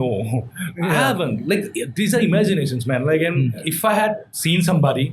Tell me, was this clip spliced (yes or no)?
yes